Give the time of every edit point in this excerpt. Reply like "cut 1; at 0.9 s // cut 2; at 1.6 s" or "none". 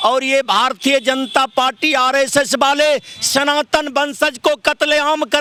none